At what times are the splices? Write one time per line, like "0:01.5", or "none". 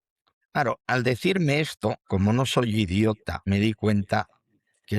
0:00.8
0:02.0
0:03.3